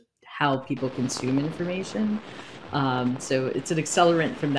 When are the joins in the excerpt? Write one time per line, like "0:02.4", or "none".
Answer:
none